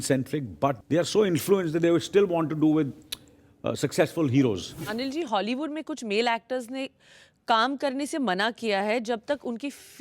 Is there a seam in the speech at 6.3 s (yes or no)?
no